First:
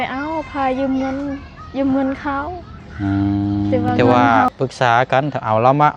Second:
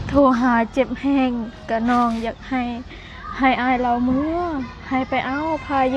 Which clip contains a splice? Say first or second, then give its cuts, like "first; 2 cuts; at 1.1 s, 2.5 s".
first; 1 cut; at 4.0 s